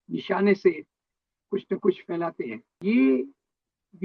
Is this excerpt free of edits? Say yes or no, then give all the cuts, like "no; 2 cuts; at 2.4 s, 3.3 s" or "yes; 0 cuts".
no; 1 cut; at 2.8 s